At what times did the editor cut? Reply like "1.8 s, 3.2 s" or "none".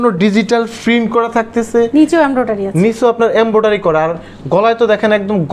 none